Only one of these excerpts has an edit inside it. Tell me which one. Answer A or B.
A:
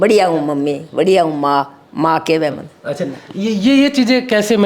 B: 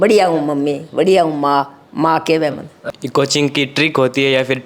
B